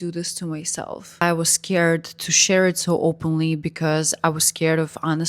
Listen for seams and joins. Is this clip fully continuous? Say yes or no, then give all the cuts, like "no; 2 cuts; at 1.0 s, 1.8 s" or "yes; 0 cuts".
no; 1 cut; at 1.2 s